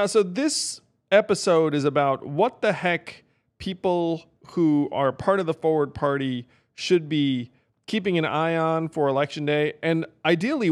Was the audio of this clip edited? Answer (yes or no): no